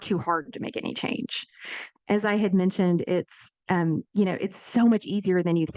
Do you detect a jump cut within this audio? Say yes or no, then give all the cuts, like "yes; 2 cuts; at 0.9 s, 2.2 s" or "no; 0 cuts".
no; 0 cuts